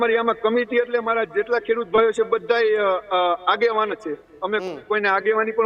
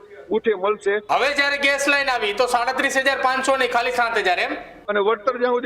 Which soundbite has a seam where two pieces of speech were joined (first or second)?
second